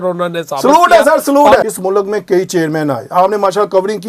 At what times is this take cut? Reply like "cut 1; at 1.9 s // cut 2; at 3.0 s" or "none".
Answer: cut 1; at 1.6 s